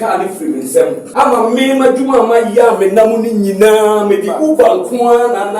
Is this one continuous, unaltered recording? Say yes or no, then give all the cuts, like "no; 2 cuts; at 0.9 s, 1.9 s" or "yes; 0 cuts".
no; 1 cut; at 1.0 s